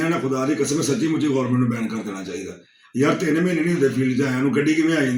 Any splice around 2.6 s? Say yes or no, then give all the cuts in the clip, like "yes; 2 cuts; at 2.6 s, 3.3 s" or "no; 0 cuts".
no; 0 cuts